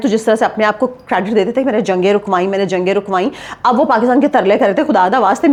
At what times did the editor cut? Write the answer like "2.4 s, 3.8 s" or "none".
none